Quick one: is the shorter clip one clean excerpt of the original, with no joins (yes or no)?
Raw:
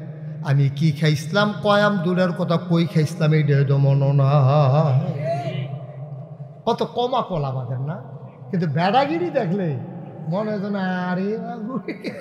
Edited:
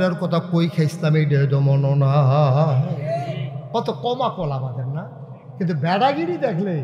no